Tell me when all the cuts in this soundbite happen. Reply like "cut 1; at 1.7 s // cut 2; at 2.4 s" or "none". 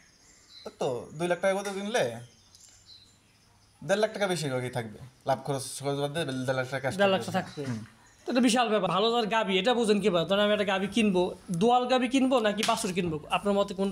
cut 1; at 8.9 s